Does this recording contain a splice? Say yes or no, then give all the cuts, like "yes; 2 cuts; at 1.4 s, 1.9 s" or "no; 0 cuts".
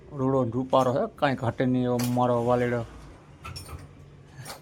no; 0 cuts